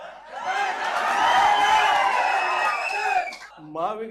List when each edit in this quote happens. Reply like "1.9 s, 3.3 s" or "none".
none